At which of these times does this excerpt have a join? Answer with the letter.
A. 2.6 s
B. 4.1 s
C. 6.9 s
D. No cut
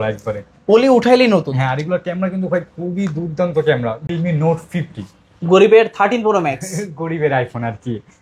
B